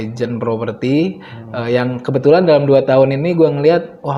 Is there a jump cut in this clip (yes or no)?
no